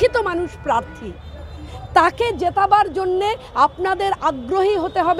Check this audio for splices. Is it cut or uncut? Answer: uncut